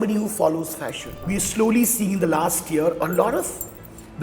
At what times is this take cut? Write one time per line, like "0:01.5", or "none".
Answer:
0:01.1